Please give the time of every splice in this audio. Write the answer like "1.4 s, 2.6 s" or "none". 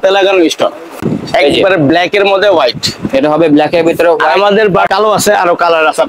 1.1 s, 4.9 s